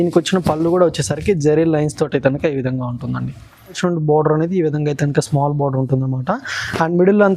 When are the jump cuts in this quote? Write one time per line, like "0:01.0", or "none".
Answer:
0:03.8